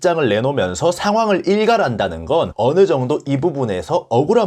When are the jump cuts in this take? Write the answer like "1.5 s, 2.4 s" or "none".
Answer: 2.5 s